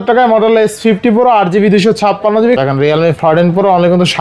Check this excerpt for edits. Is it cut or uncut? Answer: cut